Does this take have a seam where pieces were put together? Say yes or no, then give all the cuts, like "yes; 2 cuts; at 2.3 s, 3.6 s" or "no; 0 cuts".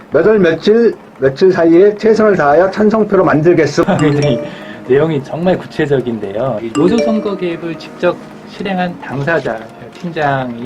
yes; 2 cuts; at 3.8 s, 6.6 s